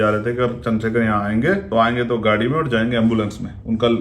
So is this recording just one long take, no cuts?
no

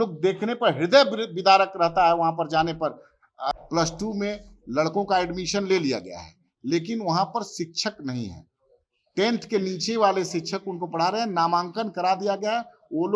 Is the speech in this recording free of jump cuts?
no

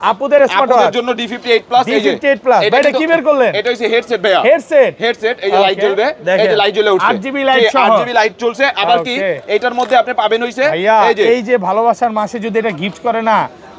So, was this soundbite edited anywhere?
no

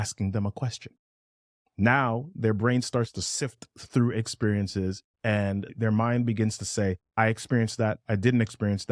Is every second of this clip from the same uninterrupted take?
yes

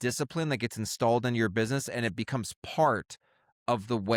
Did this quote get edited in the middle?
no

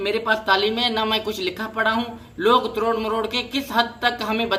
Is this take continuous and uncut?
yes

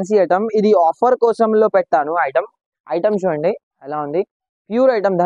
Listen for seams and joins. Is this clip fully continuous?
yes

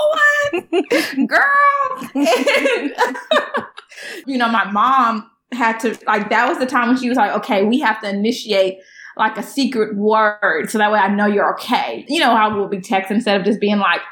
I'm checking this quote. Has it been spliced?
yes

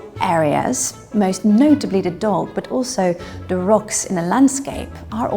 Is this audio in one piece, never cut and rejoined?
yes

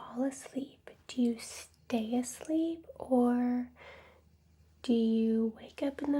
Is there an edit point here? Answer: no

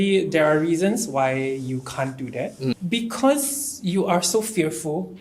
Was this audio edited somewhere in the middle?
yes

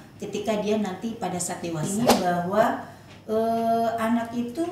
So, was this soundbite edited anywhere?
yes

